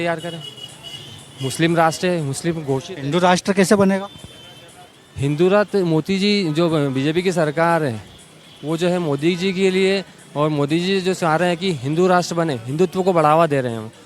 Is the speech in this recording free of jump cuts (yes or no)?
yes